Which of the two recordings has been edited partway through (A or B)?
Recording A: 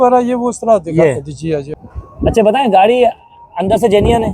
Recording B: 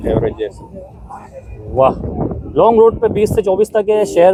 A